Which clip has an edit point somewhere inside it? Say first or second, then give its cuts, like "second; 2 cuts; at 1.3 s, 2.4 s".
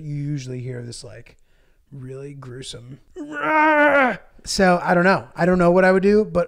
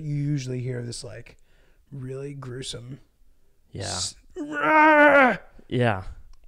first; 2 cuts; at 3.0 s, 4.4 s